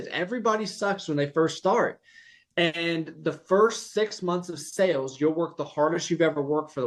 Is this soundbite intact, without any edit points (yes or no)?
yes